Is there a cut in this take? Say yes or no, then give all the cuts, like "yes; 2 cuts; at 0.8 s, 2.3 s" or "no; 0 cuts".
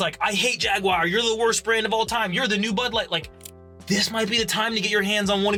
no; 0 cuts